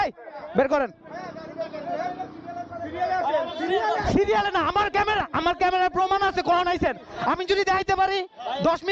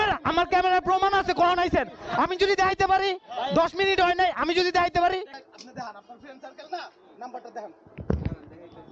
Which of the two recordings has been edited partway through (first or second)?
second